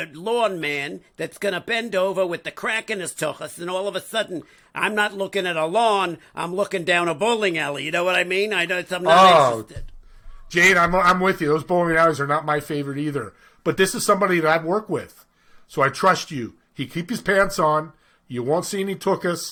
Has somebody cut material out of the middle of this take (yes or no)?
no